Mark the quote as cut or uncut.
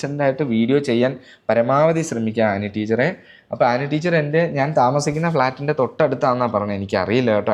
uncut